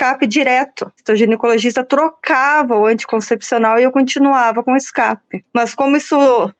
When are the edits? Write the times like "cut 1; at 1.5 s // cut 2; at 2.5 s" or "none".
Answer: cut 1; at 1.0 s // cut 2; at 5.3 s